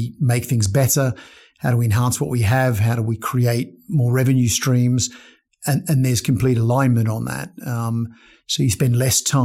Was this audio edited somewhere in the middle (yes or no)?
no